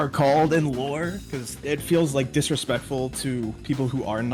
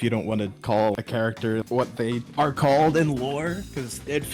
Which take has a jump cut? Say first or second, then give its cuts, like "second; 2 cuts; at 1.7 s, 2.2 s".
second; 1 cut; at 1.0 s